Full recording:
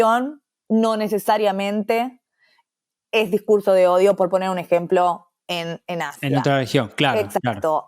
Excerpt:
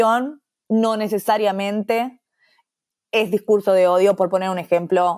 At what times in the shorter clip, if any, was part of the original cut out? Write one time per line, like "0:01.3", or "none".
none